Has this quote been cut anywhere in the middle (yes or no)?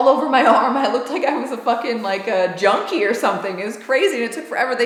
no